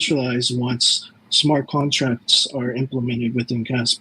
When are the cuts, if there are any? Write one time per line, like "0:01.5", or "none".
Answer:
none